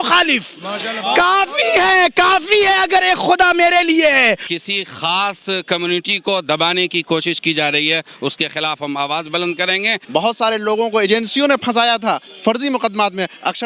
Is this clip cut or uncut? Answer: cut